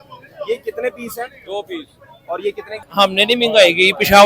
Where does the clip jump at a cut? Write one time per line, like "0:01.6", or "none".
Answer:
0:02.8